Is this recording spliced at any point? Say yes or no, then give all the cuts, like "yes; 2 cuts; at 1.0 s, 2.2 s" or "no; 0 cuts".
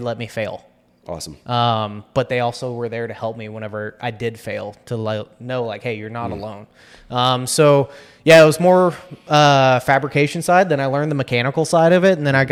no; 0 cuts